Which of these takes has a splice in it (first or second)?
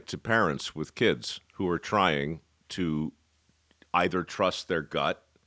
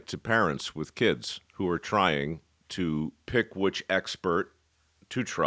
second